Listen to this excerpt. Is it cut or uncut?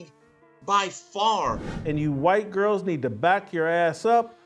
cut